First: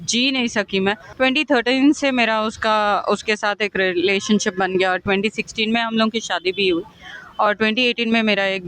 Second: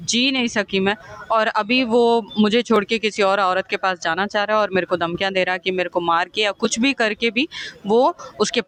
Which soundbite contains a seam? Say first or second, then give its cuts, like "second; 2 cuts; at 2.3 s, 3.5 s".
first; 1 cut; at 1.1 s